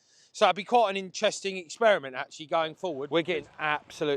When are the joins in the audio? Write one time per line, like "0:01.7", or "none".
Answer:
0:03.0